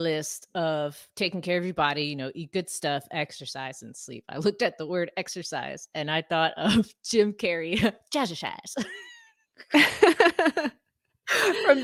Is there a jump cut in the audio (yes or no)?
no